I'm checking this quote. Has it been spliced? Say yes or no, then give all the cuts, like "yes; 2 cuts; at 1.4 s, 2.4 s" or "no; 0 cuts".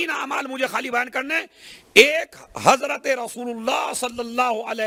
no; 0 cuts